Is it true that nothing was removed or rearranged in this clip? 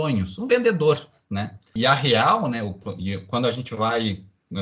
no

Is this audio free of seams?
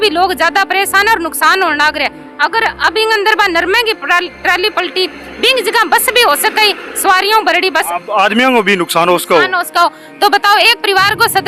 yes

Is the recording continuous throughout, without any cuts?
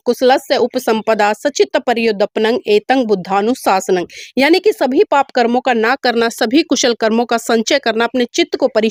yes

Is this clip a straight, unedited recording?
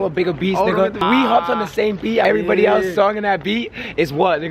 no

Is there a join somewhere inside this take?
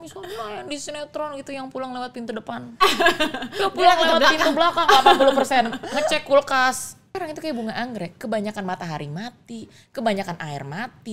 yes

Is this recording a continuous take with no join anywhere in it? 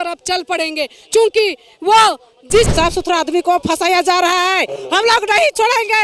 no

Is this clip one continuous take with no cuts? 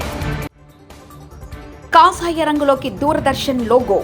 no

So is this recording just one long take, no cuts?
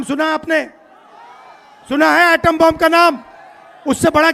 yes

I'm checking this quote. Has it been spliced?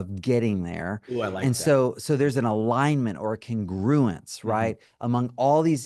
no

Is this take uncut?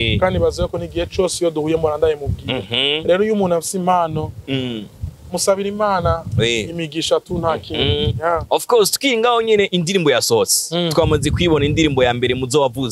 yes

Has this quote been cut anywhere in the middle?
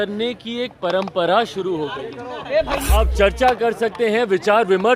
yes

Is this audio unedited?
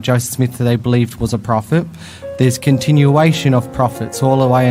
yes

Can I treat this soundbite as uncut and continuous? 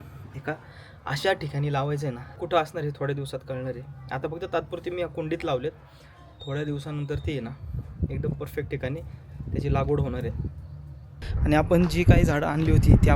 no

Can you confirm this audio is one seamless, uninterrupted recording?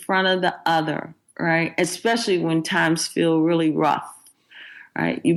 yes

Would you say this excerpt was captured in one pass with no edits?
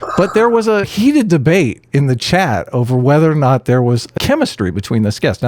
no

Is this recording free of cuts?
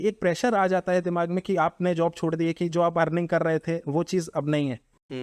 yes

